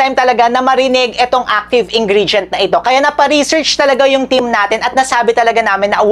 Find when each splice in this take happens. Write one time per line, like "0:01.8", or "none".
none